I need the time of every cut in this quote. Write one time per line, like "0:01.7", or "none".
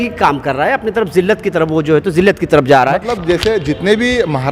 0:03.0